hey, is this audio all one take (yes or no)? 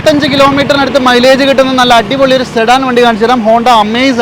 yes